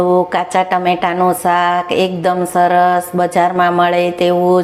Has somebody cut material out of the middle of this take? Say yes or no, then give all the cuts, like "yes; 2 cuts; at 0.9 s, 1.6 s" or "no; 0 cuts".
no; 0 cuts